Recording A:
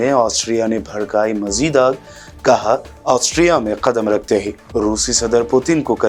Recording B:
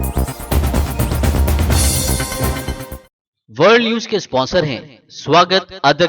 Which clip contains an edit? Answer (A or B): B